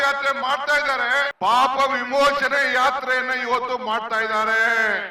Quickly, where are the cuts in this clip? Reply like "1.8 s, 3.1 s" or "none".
1.3 s